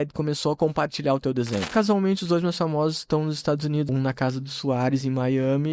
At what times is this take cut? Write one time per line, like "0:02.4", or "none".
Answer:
0:01.7
0:03.9